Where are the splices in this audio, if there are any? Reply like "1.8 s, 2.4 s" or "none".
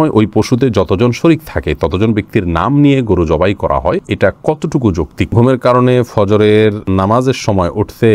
4.1 s, 5.3 s, 6.8 s